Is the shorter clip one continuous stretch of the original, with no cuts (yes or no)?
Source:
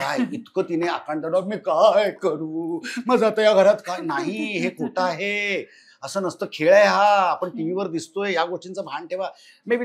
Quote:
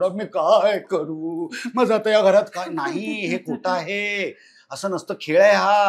yes